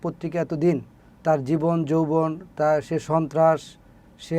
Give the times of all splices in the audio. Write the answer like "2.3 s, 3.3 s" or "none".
none

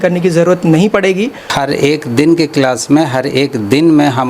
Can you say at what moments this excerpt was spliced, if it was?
1.5 s

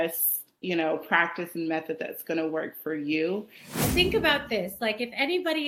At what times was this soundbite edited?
3.8 s

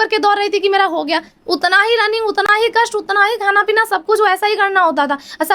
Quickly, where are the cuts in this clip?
none

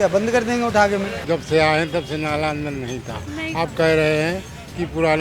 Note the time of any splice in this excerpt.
1.2 s

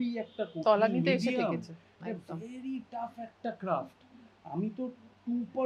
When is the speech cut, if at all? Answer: none

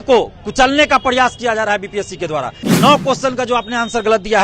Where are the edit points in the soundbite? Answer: 2.6 s

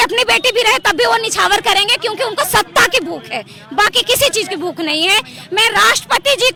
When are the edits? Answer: none

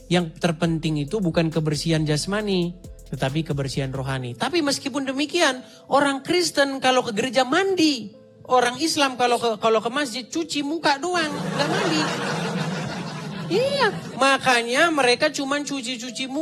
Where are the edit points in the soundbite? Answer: none

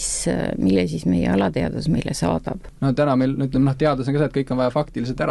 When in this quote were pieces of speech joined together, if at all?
2.6 s

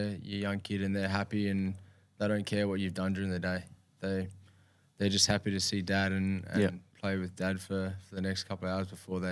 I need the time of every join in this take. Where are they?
none

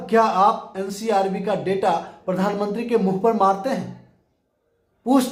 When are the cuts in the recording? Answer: none

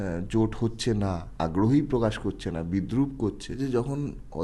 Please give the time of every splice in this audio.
1.2 s, 3.6 s

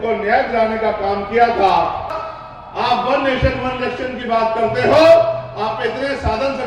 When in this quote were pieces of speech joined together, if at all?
2.1 s

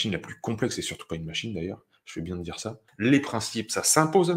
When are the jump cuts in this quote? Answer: 2.8 s

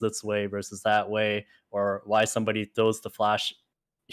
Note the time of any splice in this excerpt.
none

